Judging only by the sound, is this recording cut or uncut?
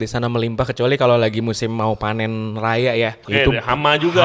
cut